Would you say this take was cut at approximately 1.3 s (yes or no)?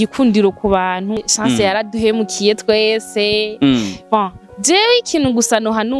yes